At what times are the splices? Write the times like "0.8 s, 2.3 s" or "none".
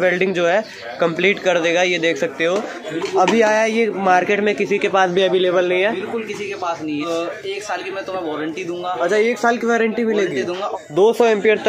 2.9 s, 7.0 s, 10.8 s

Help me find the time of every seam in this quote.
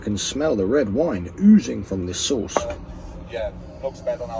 none

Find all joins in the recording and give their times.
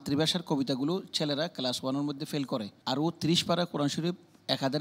2.7 s

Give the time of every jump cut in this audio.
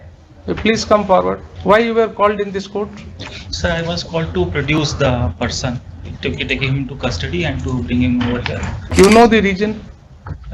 1.5 s, 8.8 s

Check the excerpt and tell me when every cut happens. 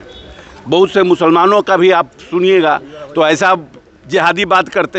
none

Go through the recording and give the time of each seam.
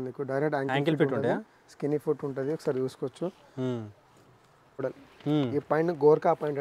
4.8 s

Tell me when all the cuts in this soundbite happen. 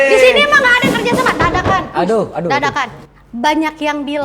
3.0 s

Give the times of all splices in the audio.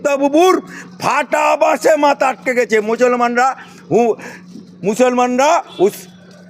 none

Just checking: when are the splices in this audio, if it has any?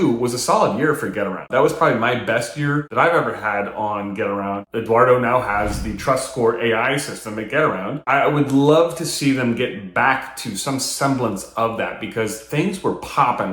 4.6 s, 8.0 s

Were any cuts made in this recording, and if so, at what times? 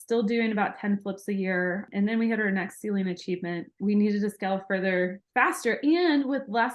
1.9 s, 3.7 s

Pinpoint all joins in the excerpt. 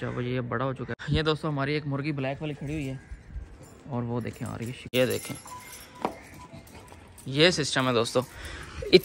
1.0 s, 4.8 s

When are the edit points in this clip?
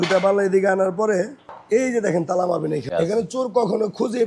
1.5 s, 2.9 s

